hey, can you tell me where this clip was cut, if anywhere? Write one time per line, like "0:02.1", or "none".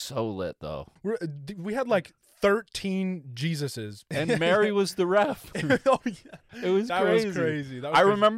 0:00.9
0:04.0